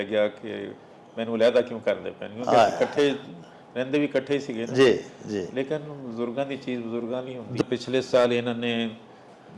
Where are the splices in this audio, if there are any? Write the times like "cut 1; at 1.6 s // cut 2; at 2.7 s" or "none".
cut 1; at 7.6 s